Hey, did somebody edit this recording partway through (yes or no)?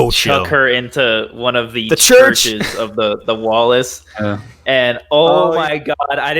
no